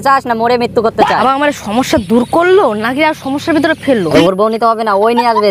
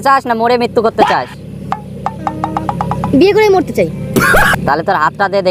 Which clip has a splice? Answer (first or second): first